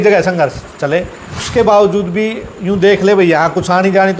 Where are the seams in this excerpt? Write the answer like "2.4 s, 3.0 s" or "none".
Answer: 1.3 s